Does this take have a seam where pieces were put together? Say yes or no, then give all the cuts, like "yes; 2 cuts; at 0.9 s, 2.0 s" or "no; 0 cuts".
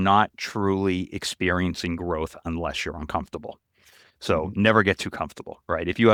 no; 0 cuts